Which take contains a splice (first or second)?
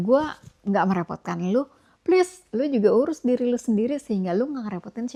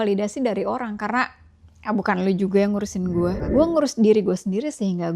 second